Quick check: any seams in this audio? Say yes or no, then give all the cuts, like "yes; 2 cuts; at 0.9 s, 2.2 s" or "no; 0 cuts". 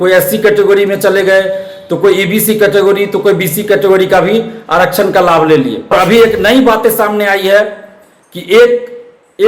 yes; 1 cut; at 5.9 s